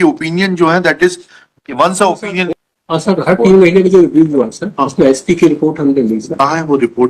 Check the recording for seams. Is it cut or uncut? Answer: cut